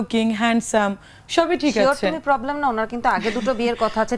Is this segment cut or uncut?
uncut